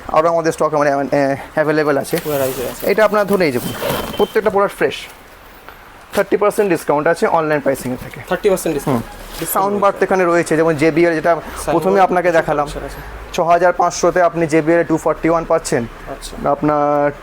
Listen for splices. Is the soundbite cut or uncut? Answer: cut